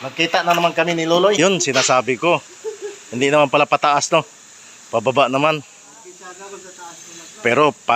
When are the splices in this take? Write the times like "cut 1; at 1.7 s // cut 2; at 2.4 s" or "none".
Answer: cut 1; at 1.4 s